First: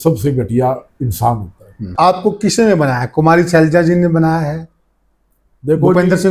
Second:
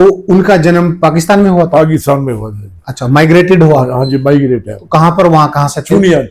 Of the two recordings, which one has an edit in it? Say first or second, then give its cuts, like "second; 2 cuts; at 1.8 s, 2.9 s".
first; 1 cut; at 1.9 s